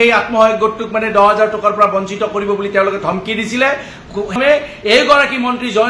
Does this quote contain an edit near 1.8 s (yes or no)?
no